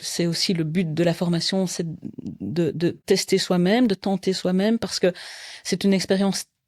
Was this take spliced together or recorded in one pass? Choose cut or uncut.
cut